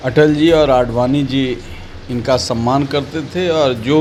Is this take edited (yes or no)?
no